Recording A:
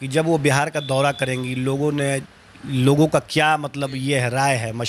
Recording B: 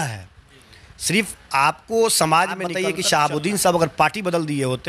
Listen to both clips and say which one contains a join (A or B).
B